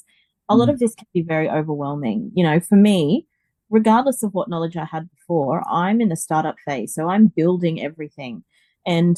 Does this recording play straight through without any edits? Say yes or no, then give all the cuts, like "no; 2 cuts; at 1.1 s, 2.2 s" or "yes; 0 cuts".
yes; 0 cuts